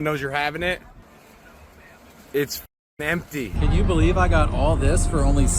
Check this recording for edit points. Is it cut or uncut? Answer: cut